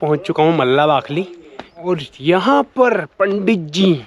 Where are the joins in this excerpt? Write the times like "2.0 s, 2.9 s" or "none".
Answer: 1.8 s